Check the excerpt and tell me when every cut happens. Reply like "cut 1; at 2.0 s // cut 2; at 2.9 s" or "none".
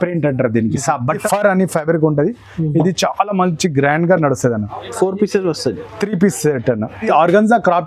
cut 1; at 1.2 s // cut 2; at 7.1 s